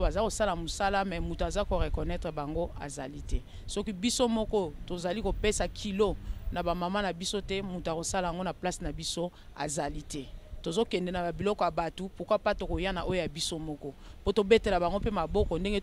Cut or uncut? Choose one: uncut